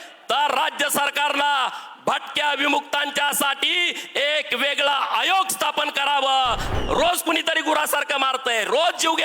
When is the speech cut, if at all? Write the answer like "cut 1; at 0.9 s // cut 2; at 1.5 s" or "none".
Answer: cut 1; at 6.7 s